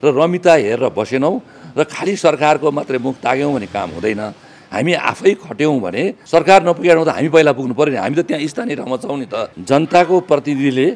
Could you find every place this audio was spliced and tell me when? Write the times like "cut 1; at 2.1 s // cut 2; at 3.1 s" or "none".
cut 1; at 6.2 s // cut 2; at 9.5 s